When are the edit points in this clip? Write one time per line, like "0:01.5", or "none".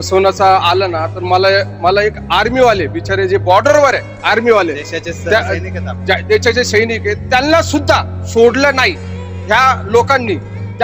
none